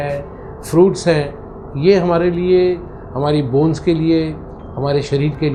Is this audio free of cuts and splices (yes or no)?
yes